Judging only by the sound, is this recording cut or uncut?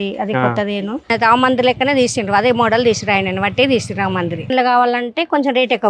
cut